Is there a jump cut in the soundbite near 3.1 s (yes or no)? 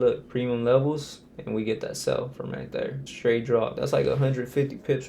yes